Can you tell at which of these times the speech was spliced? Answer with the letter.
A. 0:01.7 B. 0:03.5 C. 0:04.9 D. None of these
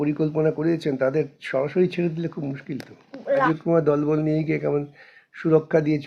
B